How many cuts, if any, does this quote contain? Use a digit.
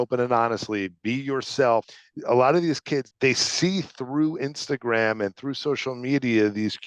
2